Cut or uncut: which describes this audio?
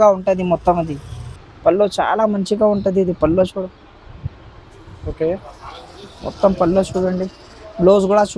uncut